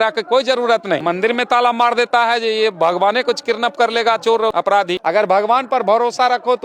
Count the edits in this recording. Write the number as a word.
two